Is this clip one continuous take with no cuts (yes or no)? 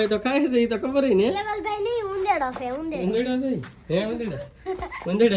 yes